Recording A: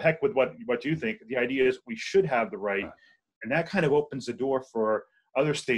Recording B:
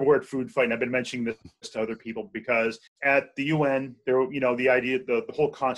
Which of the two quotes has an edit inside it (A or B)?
B